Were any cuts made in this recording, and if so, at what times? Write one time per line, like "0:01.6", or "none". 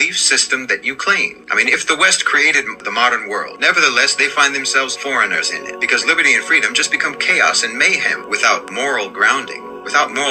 none